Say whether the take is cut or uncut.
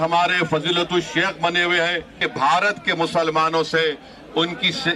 cut